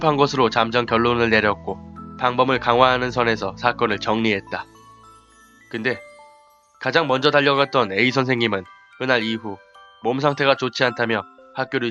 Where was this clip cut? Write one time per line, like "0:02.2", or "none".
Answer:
none